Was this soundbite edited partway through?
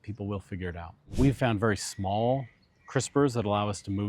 yes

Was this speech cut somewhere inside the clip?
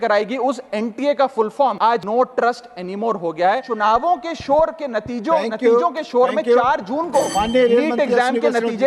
yes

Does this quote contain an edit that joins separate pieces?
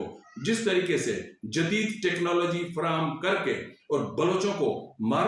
no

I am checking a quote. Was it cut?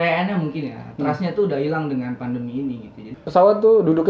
yes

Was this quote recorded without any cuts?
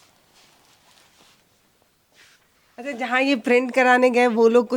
yes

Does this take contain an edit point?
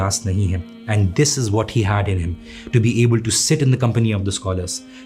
no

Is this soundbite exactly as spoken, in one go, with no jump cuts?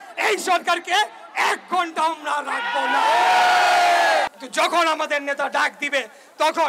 no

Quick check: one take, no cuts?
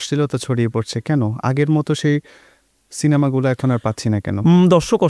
yes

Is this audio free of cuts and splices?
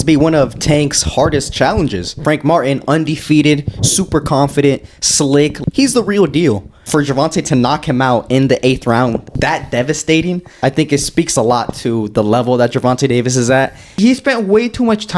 no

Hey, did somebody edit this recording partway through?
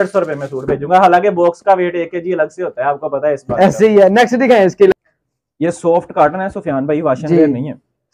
yes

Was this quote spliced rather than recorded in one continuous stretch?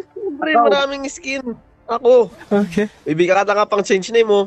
no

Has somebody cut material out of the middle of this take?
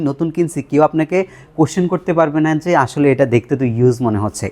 no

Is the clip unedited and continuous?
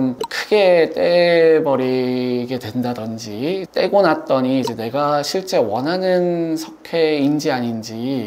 yes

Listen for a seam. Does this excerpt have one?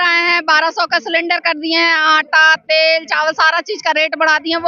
no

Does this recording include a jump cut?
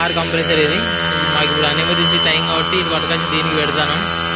no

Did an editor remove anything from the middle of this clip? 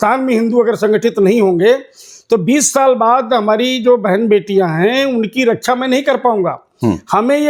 no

